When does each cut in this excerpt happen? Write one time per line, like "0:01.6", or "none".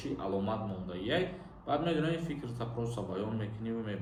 none